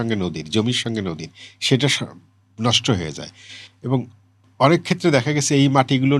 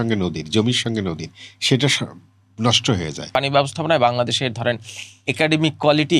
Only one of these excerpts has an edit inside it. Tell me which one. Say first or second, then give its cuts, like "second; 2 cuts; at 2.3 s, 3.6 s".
second; 1 cut; at 3.3 s